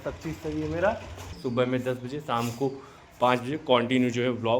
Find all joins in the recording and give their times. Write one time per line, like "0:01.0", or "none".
0:01.4